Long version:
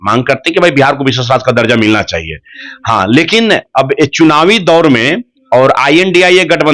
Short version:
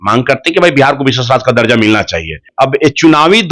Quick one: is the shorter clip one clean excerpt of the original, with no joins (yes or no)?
no